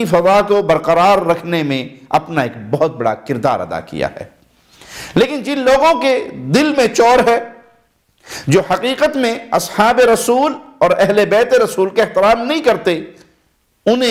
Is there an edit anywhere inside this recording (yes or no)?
no